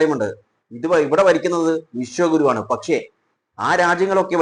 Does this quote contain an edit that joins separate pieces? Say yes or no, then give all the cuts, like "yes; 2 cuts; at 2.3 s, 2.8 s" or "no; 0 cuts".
no; 0 cuts